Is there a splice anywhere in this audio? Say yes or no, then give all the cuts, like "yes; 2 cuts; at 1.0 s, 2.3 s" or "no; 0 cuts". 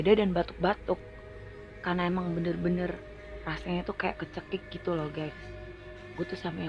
no; 0 cuts